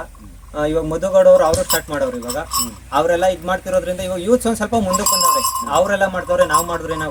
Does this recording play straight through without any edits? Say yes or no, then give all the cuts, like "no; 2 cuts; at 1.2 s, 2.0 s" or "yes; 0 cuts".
yes; 0 cuts